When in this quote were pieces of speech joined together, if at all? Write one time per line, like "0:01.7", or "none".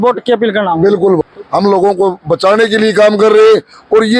0:01.2